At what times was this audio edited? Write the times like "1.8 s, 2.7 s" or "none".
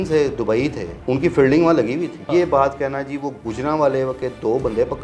0.9 s, 2.3 s